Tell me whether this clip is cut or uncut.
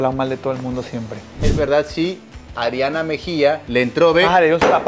cut